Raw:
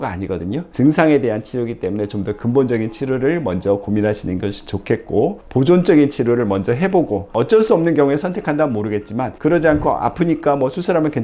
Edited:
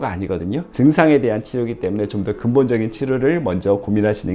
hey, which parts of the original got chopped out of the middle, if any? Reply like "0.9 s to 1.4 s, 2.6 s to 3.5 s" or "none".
none